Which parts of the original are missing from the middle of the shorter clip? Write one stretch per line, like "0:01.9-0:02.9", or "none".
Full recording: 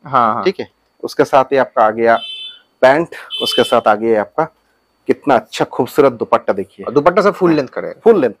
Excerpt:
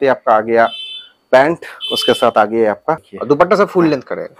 0:04.6-0:06.8